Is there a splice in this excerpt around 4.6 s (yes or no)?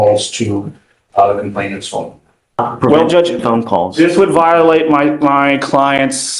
no